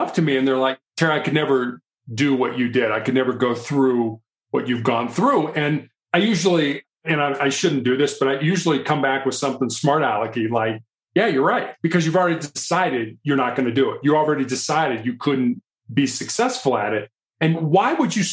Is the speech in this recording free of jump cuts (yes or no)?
yes